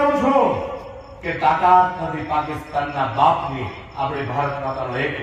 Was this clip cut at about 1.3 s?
no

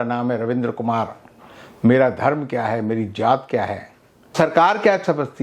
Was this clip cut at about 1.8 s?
no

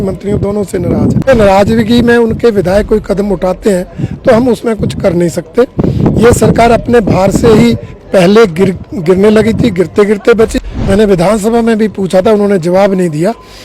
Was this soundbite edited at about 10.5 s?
yes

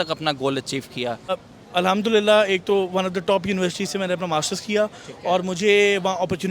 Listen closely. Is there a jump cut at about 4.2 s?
no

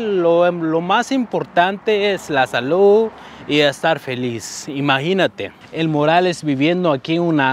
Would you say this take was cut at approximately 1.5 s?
no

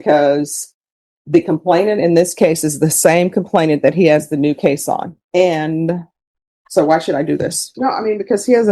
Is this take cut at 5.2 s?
yes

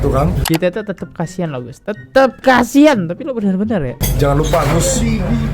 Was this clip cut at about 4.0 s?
yes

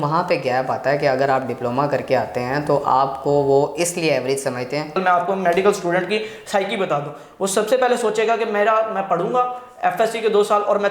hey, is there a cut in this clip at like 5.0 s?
yes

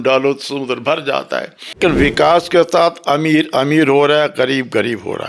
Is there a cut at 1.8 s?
yes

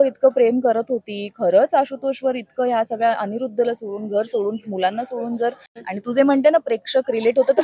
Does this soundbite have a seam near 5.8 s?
yes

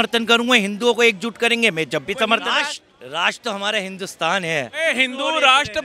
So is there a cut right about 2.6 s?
yes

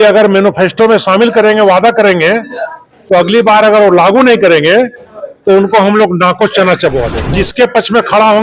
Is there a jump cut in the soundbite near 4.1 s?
no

